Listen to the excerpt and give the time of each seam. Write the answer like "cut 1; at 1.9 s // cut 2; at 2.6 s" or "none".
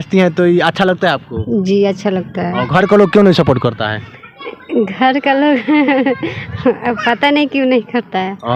none